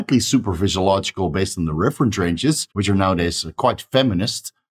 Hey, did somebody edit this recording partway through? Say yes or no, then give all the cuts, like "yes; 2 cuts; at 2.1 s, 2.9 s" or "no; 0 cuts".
yes; 1 cut; at 2.7 s